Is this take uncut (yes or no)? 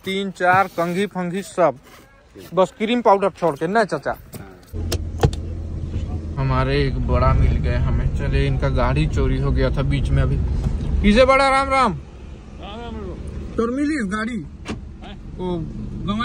yes